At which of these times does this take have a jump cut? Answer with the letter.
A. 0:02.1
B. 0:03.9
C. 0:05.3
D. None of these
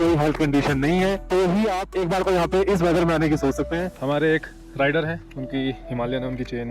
B